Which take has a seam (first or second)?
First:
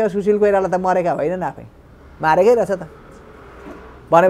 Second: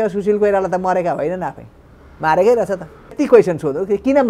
second